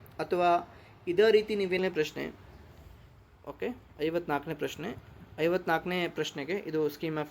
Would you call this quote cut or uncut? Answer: cut